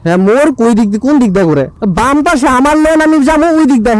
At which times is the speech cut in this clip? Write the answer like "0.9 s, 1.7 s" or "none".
1.7 s